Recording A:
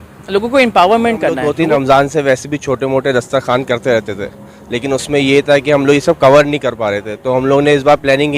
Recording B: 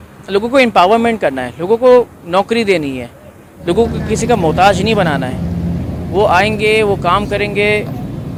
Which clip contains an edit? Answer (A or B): A